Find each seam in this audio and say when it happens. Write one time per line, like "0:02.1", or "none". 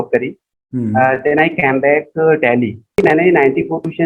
0:03.0